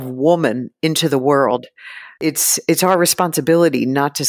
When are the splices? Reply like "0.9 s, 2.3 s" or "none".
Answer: 2.2 s